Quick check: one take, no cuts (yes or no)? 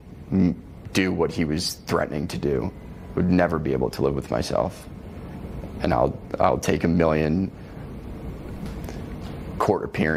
yes